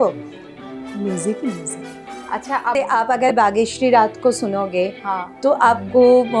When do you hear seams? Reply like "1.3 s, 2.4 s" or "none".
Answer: 2.8 s